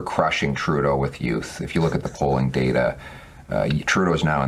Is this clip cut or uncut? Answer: uncut